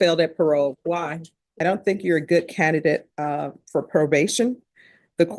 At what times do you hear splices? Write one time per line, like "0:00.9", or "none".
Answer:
0:01.4